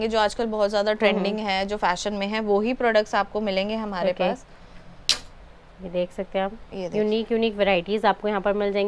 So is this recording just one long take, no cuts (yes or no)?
yes